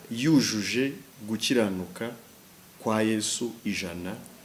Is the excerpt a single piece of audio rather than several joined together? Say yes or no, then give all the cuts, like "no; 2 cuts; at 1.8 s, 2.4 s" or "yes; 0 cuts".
yes; 0 cuts